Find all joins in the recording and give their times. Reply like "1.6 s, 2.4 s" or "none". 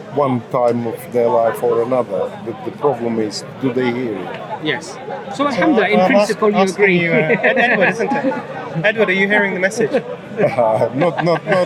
none